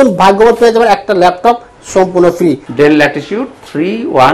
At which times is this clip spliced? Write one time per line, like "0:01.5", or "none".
0:02.7